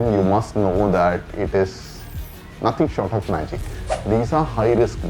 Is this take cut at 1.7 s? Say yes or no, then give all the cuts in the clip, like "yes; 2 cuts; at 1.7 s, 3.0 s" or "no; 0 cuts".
no; 1 cut; at 3.9 s